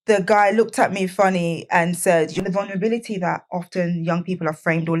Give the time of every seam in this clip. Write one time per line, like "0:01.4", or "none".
0:02.4